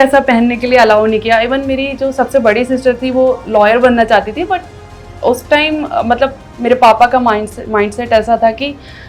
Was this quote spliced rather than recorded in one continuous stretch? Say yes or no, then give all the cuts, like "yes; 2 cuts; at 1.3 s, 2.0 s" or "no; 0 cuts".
no; 0 cuts